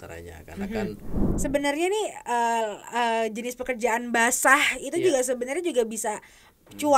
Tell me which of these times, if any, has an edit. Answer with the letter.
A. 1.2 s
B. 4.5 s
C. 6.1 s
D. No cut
A